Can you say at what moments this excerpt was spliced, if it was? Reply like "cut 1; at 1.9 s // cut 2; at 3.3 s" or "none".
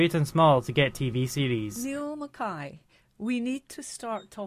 cut 1; at 1.8 s